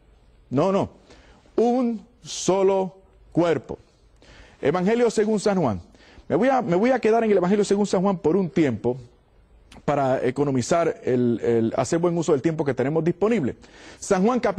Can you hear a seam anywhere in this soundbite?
no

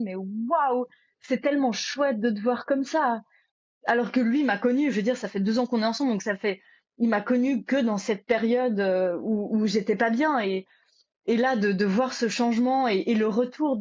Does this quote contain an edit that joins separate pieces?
no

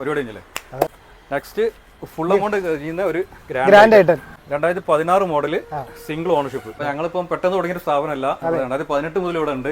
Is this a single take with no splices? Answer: no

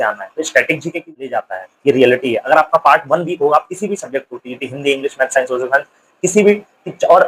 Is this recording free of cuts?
no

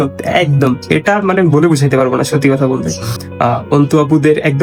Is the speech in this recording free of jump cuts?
yes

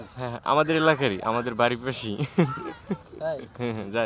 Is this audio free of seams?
yes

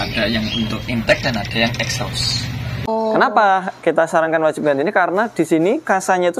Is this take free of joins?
no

